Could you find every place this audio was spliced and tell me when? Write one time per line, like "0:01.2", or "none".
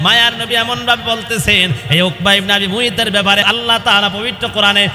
0:03.4